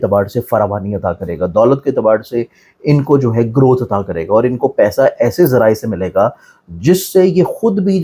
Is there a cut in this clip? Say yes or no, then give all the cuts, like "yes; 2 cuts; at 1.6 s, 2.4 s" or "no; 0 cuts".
no; 0 cuts